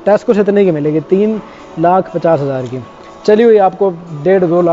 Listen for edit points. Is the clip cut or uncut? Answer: uncut